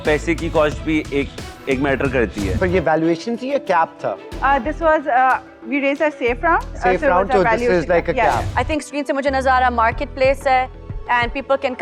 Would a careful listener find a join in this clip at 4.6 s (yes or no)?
no